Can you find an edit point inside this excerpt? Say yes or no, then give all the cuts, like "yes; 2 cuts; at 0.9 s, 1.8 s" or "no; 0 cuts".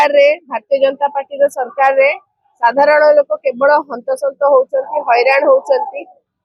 no; 0 cuts